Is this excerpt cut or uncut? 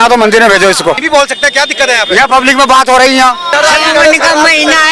cut